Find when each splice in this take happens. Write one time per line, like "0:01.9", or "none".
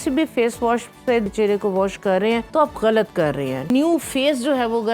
0:01.3
0:02.5
0:03.7

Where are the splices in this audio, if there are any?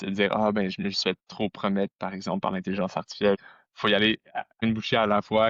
0:03.4
0:04.6

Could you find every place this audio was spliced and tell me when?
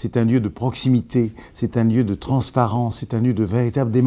none

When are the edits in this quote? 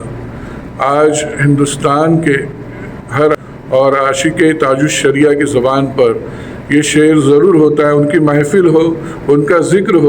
0:03.4

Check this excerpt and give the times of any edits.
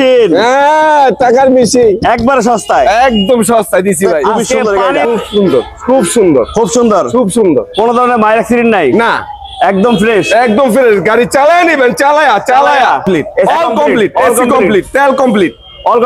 0:04.4
0:13.1

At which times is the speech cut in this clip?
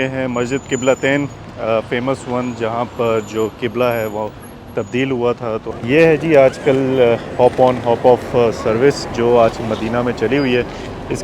0:05.7

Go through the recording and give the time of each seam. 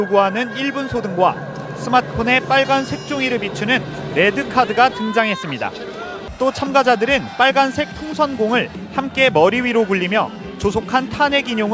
none

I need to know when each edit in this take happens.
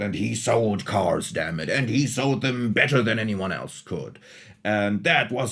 none

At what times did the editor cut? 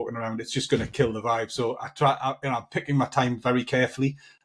none

